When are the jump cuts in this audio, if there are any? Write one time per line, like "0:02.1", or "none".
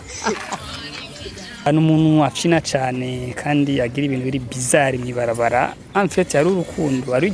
0:01.7